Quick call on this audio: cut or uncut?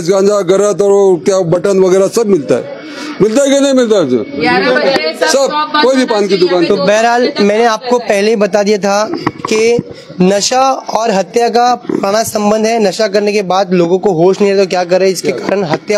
uncut